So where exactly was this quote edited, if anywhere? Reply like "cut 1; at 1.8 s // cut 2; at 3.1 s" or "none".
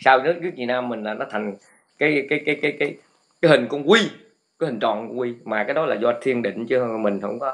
none